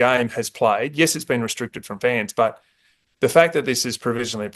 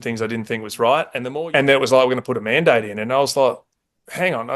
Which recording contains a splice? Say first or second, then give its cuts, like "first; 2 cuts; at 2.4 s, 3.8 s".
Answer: second; 1 cut; at 1.2 s